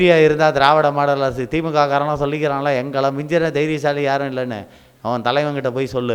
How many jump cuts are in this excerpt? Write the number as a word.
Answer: zero